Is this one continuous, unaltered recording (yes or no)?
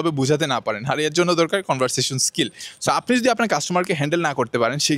no